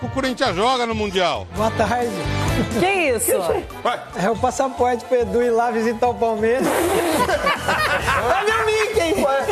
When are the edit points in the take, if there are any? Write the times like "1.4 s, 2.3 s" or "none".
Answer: none